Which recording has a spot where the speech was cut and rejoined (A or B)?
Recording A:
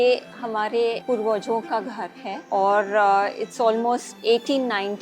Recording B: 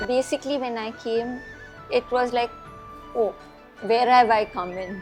A